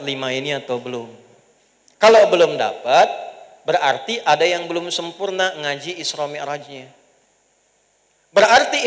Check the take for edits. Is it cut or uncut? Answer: uncut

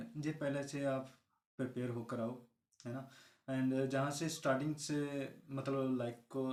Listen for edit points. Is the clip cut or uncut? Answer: uncut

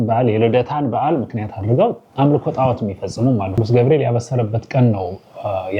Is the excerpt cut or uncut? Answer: cut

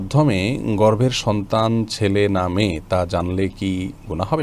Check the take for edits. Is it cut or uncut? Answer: uncut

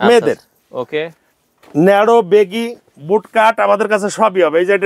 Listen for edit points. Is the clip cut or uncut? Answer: uncut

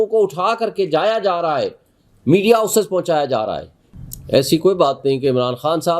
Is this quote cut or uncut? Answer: cut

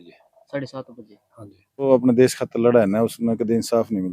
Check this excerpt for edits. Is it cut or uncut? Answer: cut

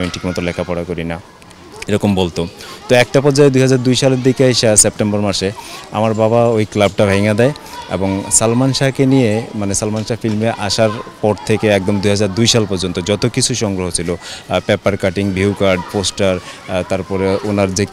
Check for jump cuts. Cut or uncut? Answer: uncut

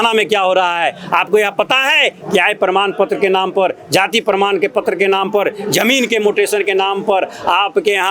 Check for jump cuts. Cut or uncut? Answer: uncut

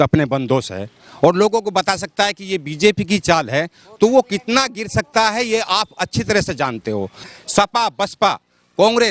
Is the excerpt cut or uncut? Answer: cut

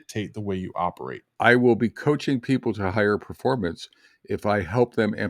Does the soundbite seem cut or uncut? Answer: cut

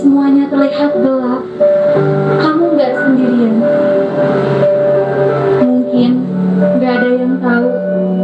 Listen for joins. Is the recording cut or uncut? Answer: uncut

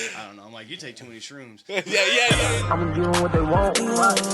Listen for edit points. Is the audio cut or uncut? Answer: cut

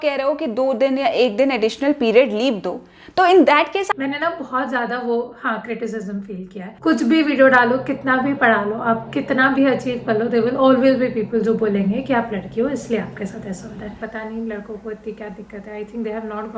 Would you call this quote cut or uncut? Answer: cut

